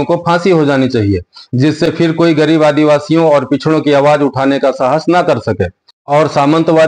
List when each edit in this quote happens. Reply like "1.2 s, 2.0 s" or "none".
none